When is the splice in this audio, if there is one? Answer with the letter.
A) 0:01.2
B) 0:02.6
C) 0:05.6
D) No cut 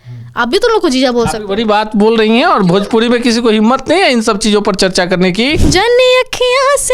C